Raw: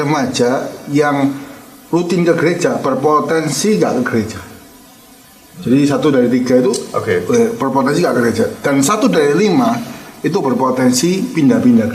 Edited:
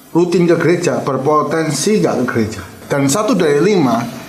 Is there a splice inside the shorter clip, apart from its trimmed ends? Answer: yes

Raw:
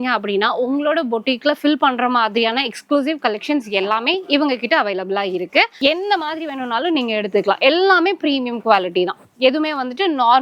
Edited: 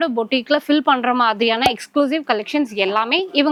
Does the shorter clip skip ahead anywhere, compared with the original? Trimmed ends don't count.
no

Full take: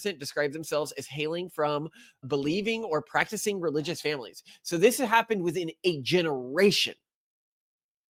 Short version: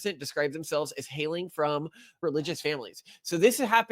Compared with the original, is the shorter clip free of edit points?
no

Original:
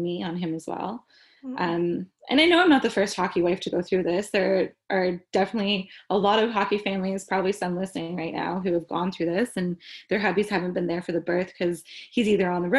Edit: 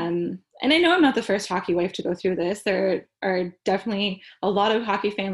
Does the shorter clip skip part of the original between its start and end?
no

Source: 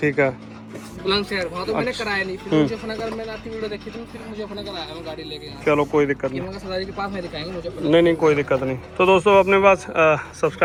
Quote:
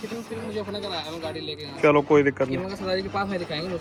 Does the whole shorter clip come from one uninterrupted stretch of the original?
yes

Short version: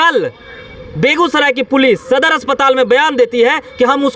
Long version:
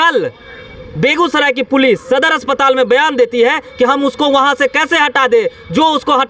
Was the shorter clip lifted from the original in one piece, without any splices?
yes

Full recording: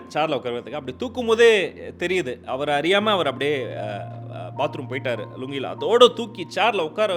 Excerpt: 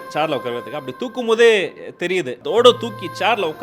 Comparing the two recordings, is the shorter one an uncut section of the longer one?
no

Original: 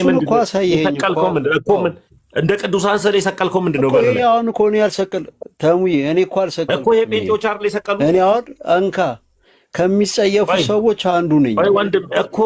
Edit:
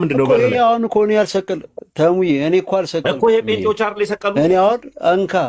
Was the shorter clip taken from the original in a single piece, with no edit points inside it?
yes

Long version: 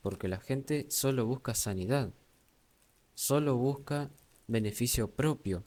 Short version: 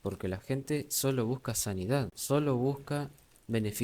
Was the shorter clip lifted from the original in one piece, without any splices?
no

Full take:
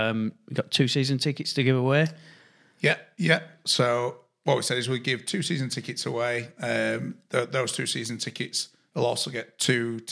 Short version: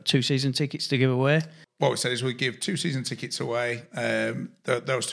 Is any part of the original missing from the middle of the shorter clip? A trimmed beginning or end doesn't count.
yes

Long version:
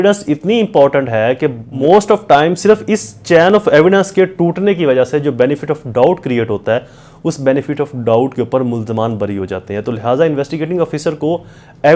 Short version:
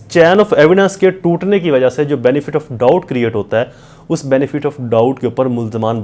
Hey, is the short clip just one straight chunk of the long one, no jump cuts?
yes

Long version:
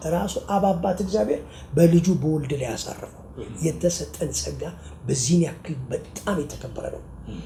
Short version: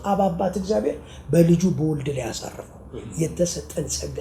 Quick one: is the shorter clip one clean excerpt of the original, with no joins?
yes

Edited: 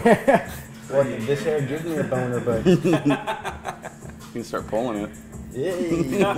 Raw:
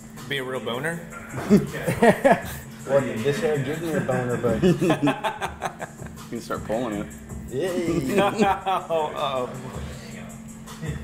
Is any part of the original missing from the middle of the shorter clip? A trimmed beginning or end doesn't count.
no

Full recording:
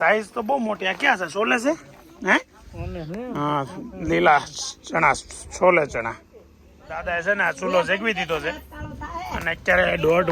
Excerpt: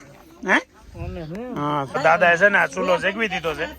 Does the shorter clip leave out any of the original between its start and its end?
yes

